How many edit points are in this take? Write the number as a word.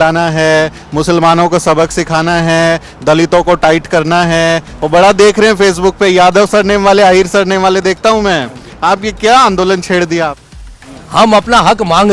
one